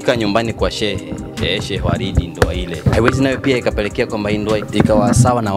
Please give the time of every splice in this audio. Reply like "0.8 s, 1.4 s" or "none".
2.8 s, 4.6 s